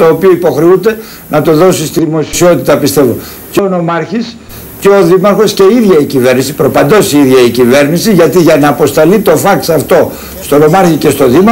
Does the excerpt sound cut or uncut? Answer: uncut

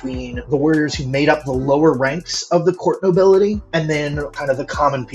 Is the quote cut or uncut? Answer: cut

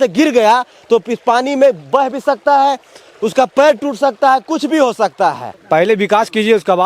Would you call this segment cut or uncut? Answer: cut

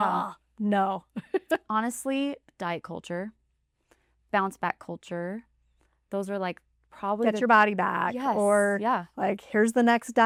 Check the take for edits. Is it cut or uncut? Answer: uncut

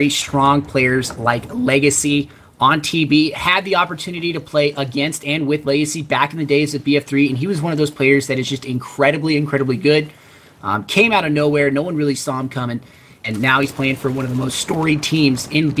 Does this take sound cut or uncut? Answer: cut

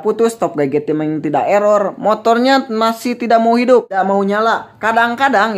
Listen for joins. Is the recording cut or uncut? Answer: cut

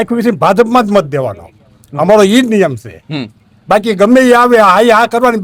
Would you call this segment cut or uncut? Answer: uncut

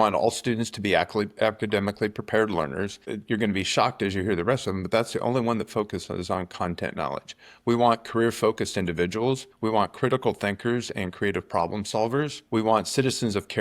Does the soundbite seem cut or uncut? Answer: cut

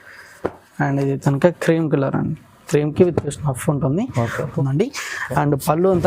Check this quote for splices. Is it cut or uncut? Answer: cut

